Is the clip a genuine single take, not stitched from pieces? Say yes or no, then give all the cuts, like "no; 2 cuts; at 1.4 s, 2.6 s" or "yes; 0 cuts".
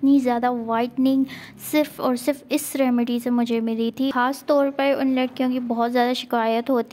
no; 1 cut; at 4.1 s